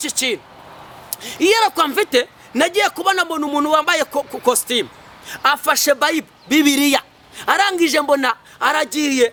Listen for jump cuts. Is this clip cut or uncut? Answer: uncut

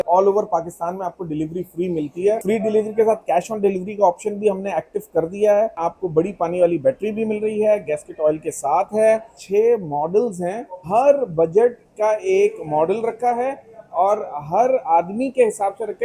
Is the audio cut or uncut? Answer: cut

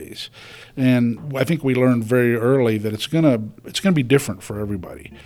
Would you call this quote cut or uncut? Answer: cut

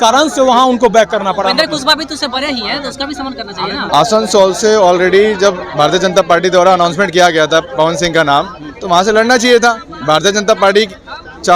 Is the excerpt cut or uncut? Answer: cut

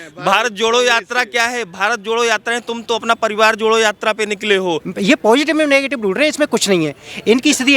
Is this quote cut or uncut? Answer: cut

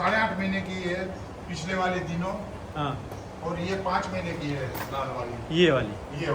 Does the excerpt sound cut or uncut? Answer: uncut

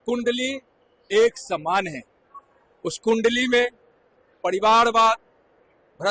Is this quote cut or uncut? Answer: uncut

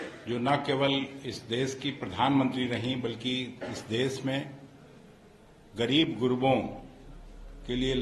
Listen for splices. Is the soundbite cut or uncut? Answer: uncut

